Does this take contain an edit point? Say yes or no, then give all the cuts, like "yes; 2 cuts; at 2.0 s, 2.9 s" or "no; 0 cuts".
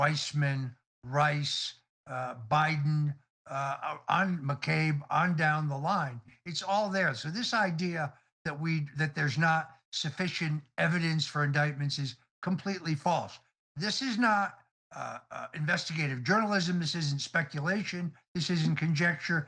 no; 0 cuts